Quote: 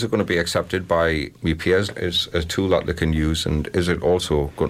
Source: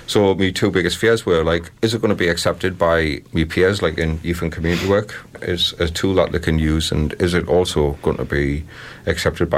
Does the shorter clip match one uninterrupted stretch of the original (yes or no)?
no